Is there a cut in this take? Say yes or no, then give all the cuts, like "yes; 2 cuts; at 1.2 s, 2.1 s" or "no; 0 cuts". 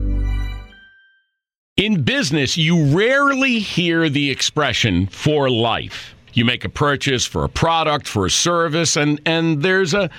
yes; 1 cut; at 1.5 s